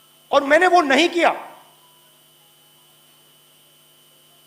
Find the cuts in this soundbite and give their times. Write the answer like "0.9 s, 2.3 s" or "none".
none